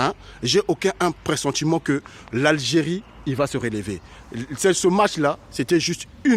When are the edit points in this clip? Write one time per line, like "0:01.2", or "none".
none

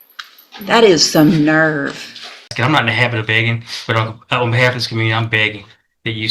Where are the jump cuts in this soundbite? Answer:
0:02.5

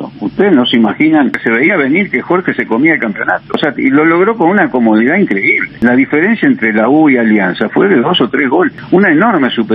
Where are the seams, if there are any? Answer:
0:01.4
0:03.6
0:05.7
0:08.8

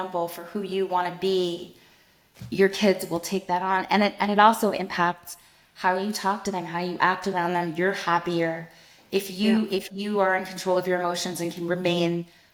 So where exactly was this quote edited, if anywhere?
none

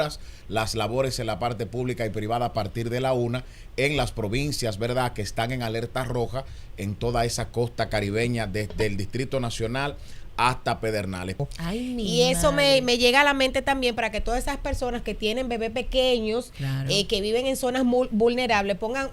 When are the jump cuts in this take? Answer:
0:11.4

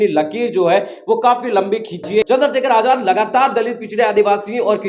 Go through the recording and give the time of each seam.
0:02.2

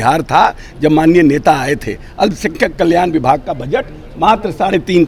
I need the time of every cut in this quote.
none

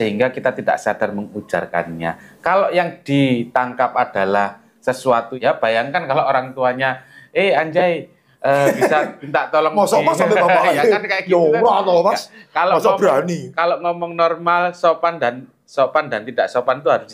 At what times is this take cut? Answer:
0:05.3

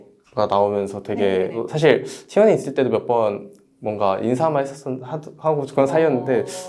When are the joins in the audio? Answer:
0:01.6

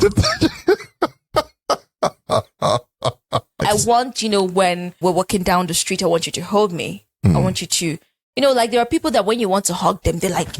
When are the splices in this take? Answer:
0:03.6
0:04.9

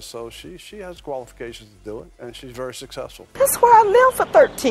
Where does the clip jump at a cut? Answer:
0:03.3

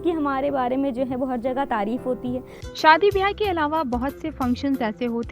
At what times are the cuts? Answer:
0:02.5

